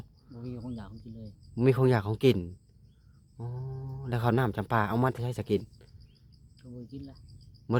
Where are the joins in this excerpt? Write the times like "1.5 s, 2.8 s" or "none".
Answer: none